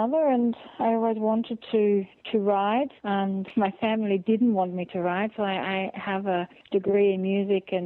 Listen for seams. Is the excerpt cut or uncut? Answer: cut